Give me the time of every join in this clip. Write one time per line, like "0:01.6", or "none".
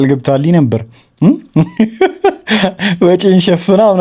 none